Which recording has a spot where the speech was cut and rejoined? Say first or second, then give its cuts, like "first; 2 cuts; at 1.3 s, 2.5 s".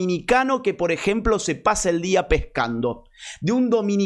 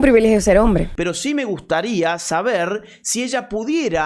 second; 1 cut; at 0.9 s